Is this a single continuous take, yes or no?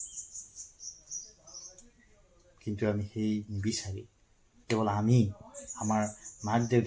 yes